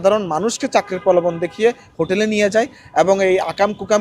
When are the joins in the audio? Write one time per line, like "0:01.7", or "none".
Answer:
none